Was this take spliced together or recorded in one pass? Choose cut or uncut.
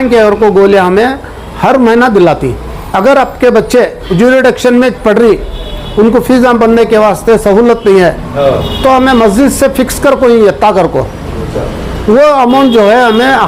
cut